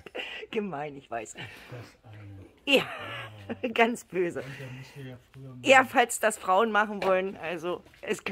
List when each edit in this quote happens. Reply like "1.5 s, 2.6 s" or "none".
none

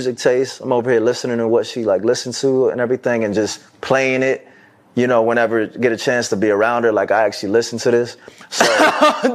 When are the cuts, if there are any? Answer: none

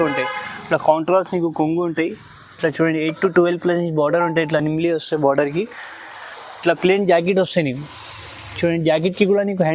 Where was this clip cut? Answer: none

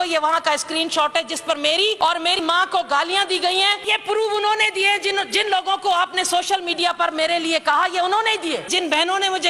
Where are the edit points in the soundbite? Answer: 2.0 s, 3.8 s, 8.7 s

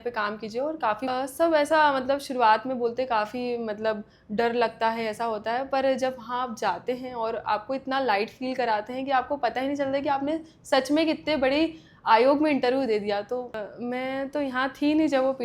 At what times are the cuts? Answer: 1.0 s, 13.6 s

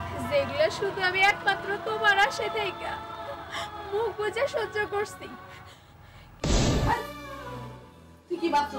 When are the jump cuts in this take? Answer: 6.3 s

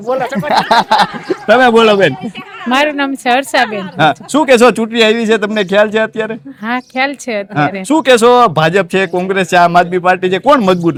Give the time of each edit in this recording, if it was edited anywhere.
none

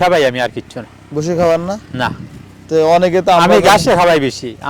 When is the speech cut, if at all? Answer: none

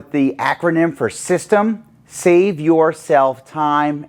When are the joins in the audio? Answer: none

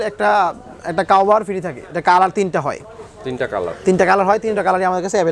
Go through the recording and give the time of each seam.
1.9 s

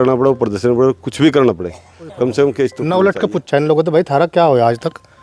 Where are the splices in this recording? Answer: 2.8 s

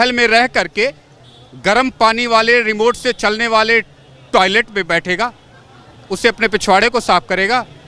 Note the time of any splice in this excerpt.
none

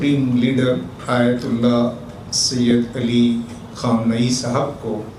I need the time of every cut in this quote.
0.9 s

